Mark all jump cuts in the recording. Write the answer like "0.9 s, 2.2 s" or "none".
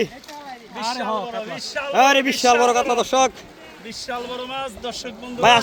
none